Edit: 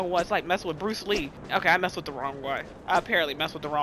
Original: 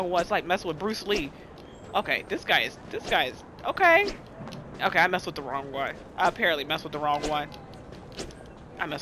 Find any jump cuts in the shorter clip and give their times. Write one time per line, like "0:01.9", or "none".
0:01.4